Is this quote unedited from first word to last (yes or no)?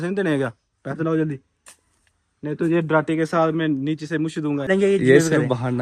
no